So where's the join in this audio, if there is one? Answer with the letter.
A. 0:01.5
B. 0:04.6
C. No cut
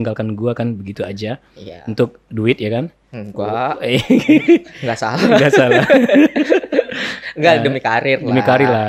C